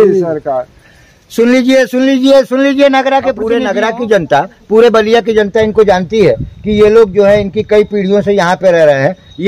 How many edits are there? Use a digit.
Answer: 1